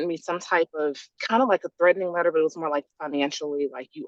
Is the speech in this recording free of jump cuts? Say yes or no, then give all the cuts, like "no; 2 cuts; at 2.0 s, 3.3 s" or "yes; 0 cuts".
no; 1 cut; at 1.1 s